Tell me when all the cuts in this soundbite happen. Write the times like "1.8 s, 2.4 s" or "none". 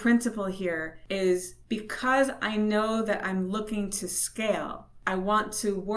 0.9 s, 1.5 s, 4.9 s